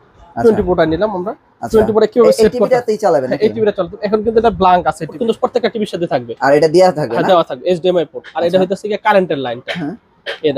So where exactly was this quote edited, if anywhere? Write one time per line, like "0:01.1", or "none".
0:05.2